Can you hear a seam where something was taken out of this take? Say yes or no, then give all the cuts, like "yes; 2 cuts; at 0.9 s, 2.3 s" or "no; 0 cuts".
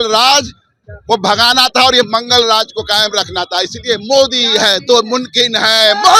no; 0 cuts